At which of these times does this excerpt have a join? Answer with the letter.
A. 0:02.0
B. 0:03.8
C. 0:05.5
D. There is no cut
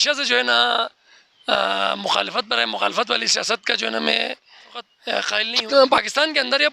C